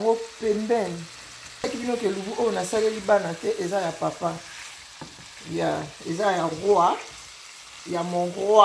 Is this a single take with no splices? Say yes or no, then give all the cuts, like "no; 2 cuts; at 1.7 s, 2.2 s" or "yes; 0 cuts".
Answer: no; 1 cut; at 1.6 s